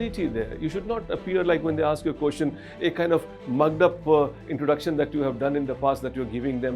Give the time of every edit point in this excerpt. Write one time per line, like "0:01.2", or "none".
none